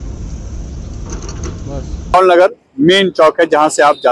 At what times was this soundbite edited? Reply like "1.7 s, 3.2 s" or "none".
2.1 s